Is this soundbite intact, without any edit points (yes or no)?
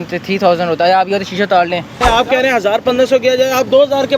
no